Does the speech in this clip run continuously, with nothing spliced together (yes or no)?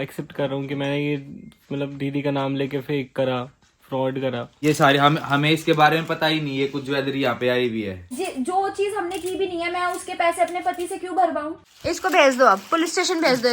no